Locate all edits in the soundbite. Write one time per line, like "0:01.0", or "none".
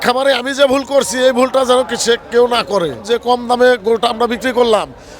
0:03.0

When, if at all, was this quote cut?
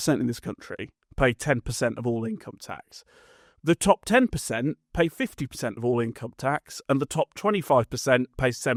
none

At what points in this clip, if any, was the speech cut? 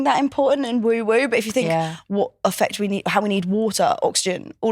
none

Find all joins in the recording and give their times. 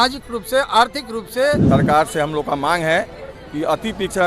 0:01.6

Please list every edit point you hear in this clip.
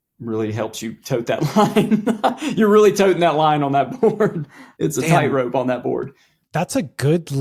0:04.6

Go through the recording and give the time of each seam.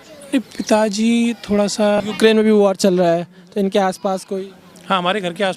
0:02.0

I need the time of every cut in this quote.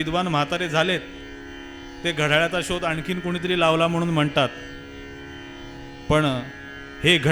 none

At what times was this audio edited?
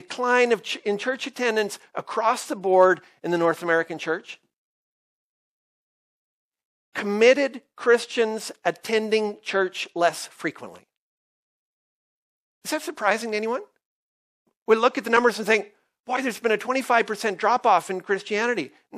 0:14.5

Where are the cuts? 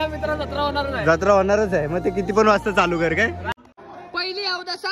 0:03.5

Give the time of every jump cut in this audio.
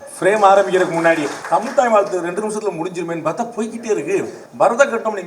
0:01.4
0:04.4

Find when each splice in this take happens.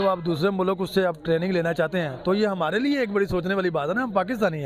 none

